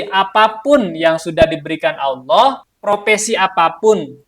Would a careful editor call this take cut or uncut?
cut